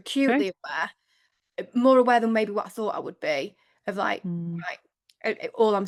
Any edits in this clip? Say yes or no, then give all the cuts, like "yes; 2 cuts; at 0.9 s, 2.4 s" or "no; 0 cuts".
no; 0 cuts